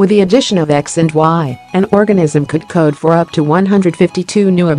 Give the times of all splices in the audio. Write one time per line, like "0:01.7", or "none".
none